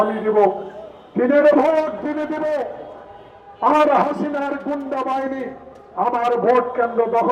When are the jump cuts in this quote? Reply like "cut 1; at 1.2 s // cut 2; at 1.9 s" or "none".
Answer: none